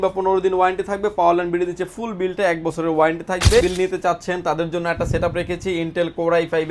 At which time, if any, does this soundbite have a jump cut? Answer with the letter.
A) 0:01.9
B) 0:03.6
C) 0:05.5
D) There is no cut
B